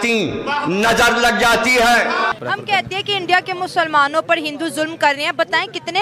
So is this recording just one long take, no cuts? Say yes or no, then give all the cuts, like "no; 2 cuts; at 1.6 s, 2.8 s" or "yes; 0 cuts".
no; 1 cut; at 2.5 s